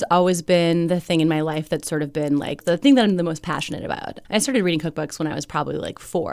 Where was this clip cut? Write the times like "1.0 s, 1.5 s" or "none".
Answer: 2.6 s, 4.2 s